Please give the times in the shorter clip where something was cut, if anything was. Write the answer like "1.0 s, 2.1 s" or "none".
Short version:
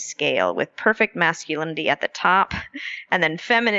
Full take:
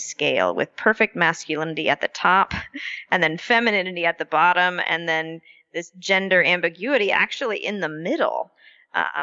none